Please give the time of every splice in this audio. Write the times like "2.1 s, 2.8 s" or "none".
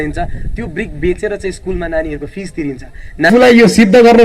3.3 s